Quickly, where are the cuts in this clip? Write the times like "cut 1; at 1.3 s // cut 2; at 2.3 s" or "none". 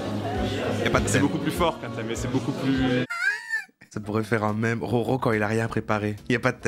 none